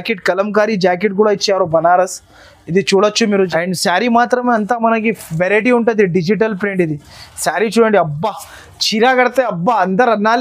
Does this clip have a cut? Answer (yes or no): yes